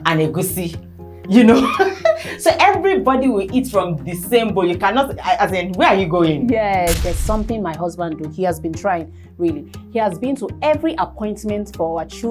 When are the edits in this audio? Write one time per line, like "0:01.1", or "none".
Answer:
0:07.0